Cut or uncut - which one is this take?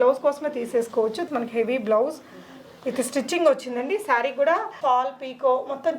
cut